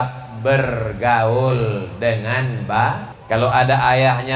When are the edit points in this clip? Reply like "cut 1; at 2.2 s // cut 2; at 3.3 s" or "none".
cut 1; at 3.1 s